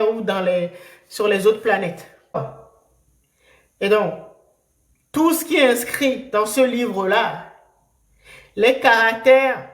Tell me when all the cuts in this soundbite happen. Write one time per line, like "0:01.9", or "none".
0:02.4